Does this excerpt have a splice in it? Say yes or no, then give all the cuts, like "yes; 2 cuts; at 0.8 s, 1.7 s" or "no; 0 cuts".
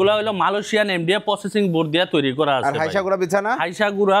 no; 0 cuts